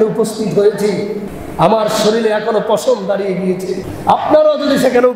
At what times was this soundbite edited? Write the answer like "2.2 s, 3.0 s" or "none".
1.3 s, 3.9 s